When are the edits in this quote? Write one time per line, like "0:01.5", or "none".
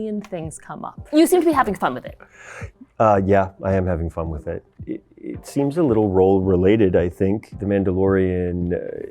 0:00.9
0:04.9
0:07.4